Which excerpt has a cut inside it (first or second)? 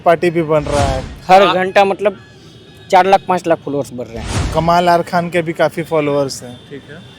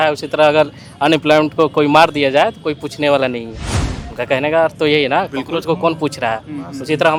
first